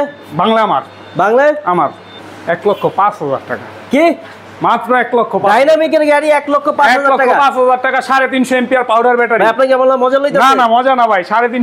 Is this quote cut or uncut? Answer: cut